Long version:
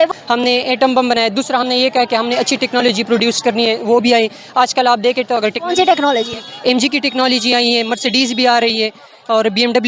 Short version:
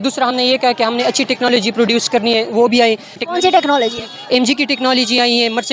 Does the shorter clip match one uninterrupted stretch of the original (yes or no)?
no